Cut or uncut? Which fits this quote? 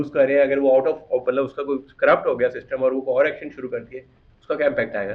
uncut